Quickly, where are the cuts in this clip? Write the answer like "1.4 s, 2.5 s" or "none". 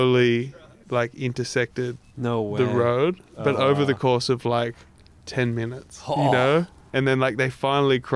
none